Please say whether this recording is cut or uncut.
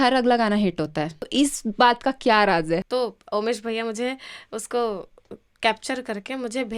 cut